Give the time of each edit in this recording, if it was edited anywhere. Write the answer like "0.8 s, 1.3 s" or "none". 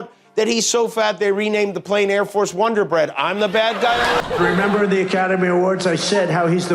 4.2 s